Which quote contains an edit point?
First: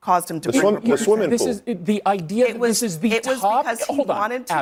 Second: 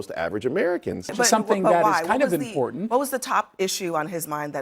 second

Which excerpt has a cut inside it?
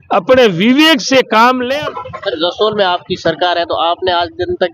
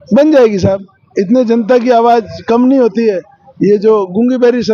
first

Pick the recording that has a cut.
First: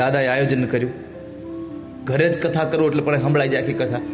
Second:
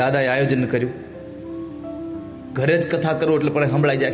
first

